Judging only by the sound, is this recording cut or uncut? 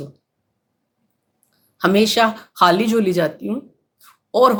uncut